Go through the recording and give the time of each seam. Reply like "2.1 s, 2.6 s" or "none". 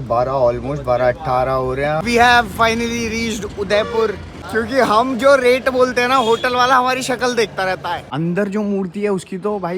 2.0 s, 4.3 s, 8.1 s